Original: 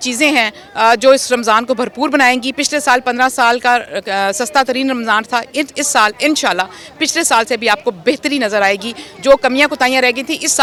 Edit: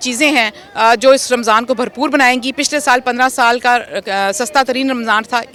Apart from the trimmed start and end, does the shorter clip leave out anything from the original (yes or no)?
no